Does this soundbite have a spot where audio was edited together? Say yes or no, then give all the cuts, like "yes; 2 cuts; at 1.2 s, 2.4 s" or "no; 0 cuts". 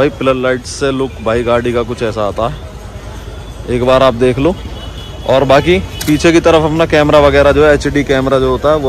no; 0 cuts